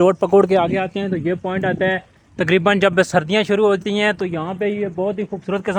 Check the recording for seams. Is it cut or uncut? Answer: uncut